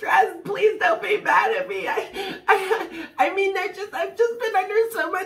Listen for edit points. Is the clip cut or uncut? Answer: uncut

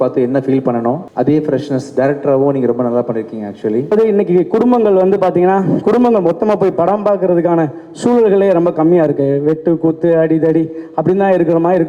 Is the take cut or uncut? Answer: cut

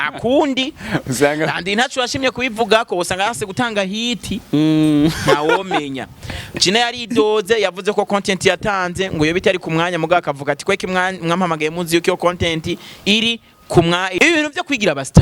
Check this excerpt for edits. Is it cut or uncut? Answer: cut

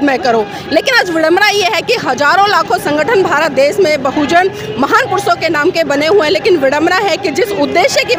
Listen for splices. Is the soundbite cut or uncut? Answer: uncut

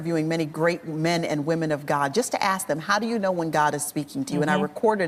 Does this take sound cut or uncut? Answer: uncut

